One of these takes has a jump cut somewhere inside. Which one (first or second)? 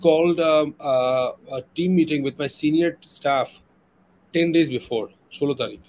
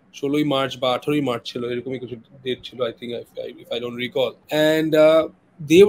second